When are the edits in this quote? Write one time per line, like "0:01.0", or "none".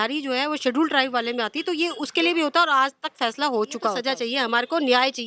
0:04.0